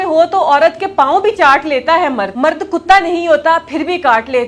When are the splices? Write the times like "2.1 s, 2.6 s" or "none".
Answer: 2.3 s